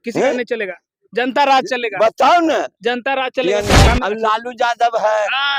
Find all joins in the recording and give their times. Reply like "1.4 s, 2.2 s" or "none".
3.9 s